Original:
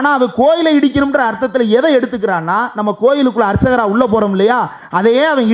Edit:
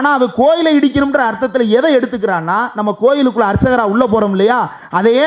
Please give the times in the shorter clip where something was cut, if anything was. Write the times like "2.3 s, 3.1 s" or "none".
none